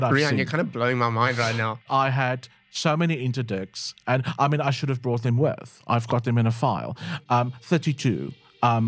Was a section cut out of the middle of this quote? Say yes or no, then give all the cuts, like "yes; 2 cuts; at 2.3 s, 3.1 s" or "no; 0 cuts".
yes; 1 cut; at 1.8 s